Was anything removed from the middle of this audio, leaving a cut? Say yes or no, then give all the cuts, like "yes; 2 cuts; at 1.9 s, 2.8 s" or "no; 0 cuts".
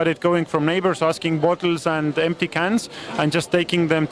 no; 0 cuts